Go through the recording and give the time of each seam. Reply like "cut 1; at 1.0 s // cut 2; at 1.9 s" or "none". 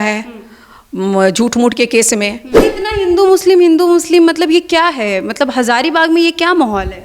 cut 1; at 2.7 s